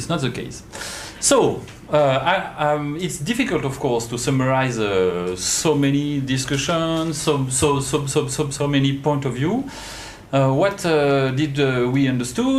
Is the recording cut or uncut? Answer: cut